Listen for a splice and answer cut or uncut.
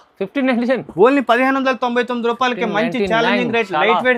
uncut